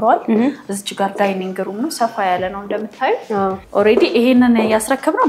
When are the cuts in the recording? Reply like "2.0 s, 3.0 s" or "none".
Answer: 3.6 s

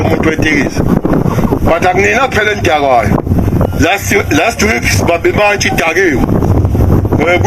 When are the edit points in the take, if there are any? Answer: none

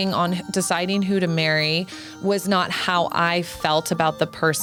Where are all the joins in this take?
none

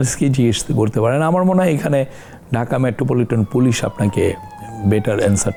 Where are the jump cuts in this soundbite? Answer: none

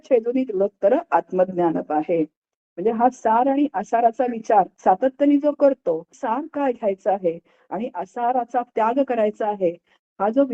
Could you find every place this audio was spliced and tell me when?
4.7 s, 6.1 s

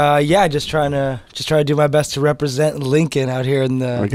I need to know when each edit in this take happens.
none

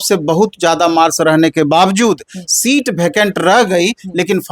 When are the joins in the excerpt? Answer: none

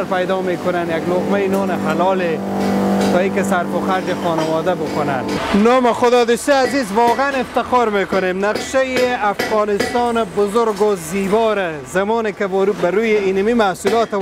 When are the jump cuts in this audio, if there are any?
5.4 s

